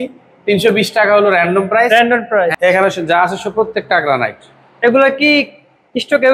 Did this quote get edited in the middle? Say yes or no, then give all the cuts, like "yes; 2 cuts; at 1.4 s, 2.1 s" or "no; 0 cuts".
yes; 1 cut; at 2.5 s